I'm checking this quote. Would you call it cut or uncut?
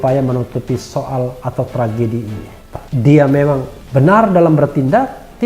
cut